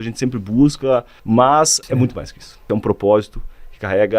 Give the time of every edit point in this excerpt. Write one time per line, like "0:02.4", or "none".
0:01.1
0:02.1